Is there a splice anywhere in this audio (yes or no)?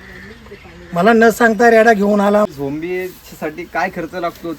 yes